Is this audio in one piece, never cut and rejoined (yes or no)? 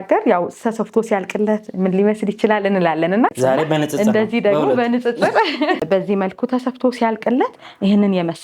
no